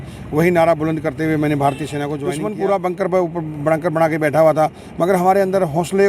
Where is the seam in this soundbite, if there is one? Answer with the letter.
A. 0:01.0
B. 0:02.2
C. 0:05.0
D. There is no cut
B